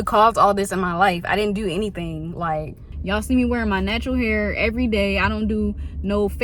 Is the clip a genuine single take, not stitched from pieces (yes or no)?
no